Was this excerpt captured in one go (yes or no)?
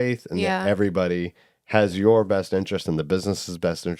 yes